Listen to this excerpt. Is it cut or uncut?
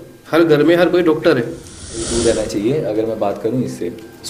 cut